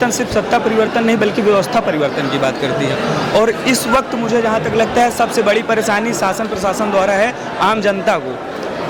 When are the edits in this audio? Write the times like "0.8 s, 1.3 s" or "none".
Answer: none

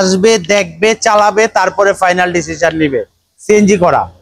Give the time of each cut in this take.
none

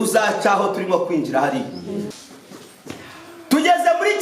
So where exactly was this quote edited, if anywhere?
2.1 s

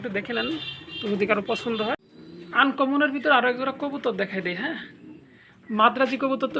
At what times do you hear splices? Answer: 2.0 s

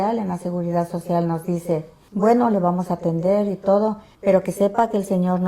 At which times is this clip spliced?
2.0 s, 4.1 s

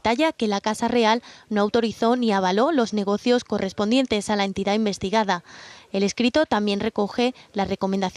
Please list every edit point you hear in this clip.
3.0 s

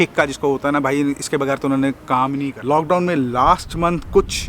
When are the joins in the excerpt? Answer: 2.5 s

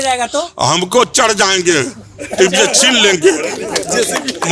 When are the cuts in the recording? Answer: none

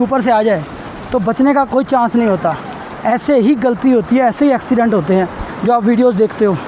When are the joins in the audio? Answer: none

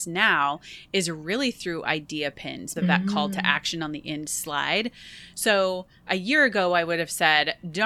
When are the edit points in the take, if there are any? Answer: 2.7 s

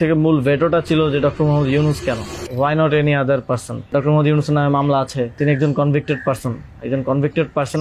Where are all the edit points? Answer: 2.4 s, 3.9 s, 5.4 s

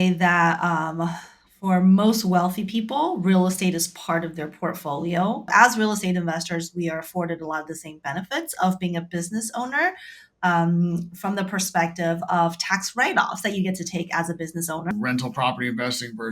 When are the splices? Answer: 5.5 s, 14.9 s

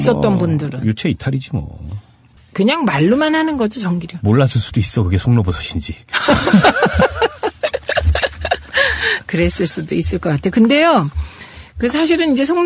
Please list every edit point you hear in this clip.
none

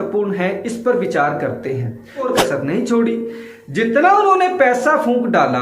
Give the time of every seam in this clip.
2.3 s

